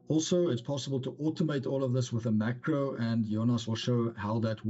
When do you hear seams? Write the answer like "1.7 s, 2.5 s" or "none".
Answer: none